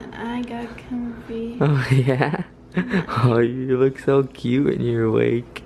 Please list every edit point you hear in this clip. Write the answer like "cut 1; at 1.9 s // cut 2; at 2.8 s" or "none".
cut 1; at 1.1 s